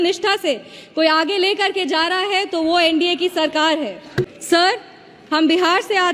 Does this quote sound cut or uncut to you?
cut